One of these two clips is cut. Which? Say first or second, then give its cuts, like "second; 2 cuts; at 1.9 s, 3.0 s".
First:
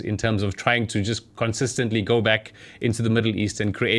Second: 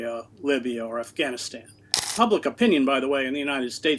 second; 1 cut; at 2.1 s